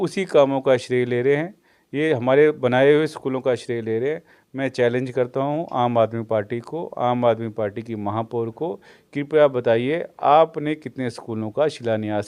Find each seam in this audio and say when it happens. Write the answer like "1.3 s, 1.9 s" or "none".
none